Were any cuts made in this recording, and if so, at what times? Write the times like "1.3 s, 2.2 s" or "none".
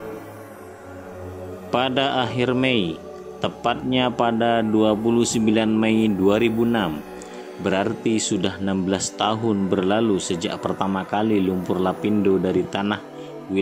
1.7 s